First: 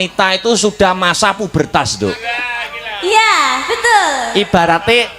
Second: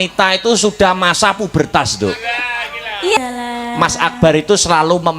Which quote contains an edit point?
second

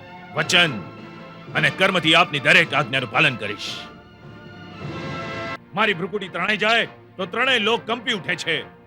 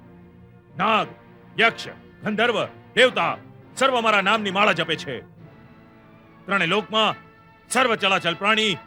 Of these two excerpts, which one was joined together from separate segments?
first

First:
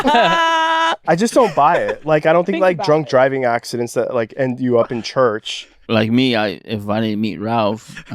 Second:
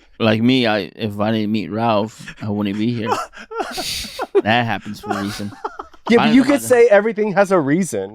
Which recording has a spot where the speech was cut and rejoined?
first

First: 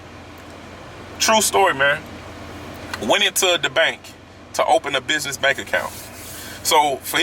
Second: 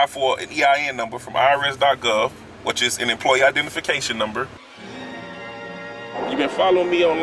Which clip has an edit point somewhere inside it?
second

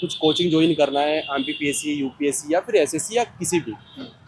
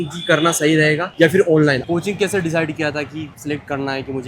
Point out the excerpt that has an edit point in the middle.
second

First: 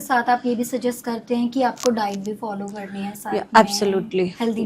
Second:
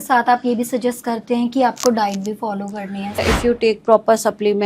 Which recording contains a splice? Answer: second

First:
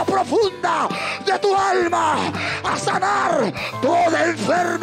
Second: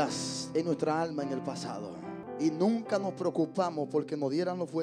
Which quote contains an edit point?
second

